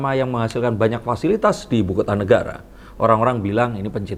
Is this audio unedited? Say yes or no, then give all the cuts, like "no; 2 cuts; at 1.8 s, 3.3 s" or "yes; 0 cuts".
yes; 0 cuts